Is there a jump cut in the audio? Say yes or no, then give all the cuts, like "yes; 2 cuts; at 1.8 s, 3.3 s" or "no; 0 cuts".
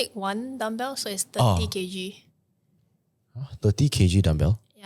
no; 0 cuts